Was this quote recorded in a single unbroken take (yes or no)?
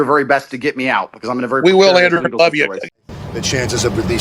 no